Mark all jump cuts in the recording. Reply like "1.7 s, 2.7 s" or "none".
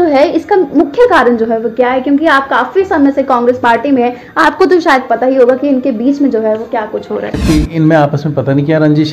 7.4 s